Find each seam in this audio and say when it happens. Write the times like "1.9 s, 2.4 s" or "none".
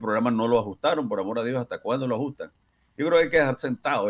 none